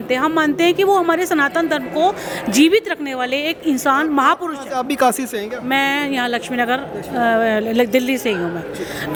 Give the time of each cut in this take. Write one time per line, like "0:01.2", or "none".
none